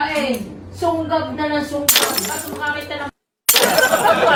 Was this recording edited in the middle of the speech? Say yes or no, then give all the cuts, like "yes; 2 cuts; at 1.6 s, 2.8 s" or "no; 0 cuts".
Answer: no; 0 cuts